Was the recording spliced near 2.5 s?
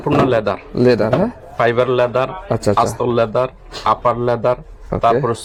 no; 0 cuts

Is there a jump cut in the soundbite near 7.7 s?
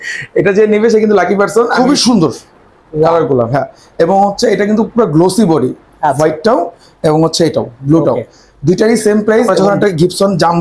no; 2 cuts; at 1.7 s, 9.5 s

